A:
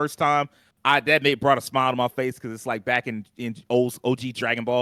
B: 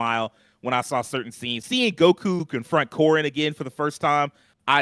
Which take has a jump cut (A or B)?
B